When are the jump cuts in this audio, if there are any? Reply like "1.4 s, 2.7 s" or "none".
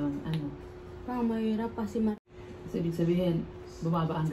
2.1 s